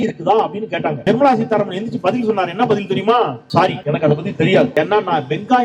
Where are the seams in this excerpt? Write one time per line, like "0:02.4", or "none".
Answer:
0:01.0
0:03.6
0:04.7